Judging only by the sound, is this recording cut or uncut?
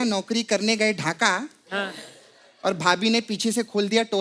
uncut